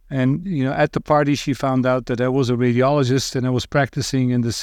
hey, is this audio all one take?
yes; 0 cuts

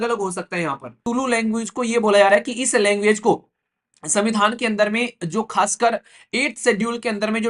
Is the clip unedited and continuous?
no; 1 cut; at 1.0 s

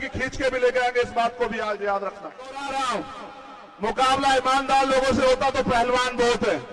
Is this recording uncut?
no; 1 cut; at 2.6 s

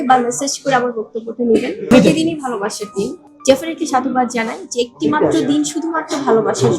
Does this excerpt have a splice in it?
yes; 2 cuts; at 1.8 s, 3.1 s

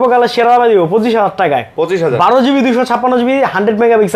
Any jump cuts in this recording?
no; 0 cuts

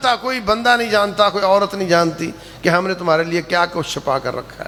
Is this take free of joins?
yes; 0 cuts

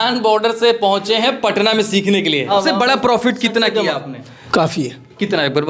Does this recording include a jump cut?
yes; 2 cuts; at 2.5 s, 4.3 s

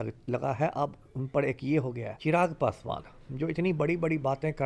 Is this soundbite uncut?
no; 1 cut; at 2.1 s

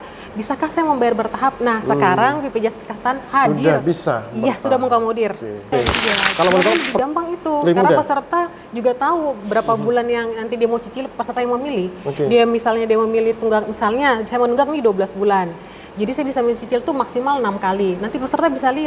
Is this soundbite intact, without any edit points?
no; 1 cut; at 6.9 s

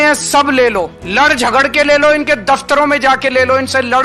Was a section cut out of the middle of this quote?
yes; 1 cut; at 1.0 s

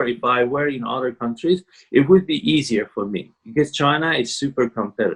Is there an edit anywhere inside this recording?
no; 0 cuts

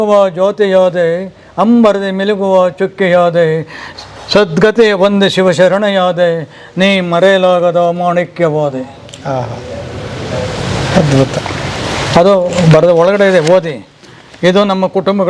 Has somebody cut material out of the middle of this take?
no; 0 cuts

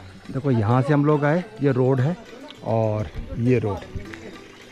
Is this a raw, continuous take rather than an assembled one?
yes; 0 cuts

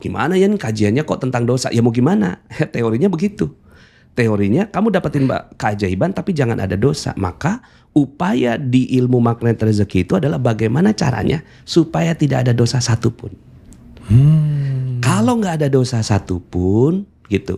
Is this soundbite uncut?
yes; 0 cuts

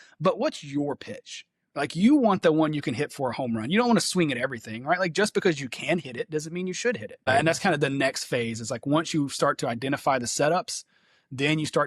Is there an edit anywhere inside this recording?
yes; 1 cut; at 7.3 s

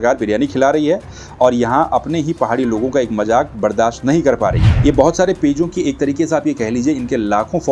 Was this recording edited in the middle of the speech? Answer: yes; 1 cut; at 4.7 s

